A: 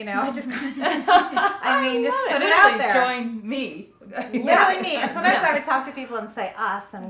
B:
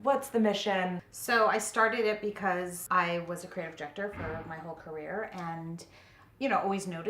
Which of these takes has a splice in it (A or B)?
B